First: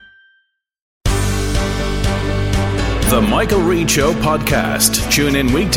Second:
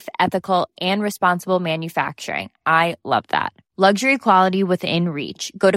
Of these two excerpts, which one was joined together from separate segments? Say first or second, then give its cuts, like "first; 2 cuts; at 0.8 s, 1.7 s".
first; 1 cut; at 0.9 s